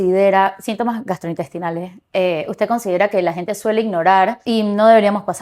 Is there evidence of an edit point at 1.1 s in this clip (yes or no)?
no